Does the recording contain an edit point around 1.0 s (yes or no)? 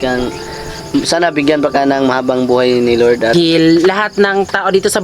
no